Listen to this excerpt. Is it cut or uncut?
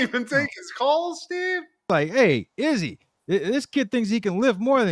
cut